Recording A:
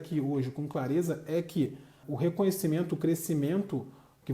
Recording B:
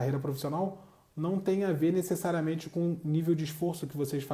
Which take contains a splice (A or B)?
A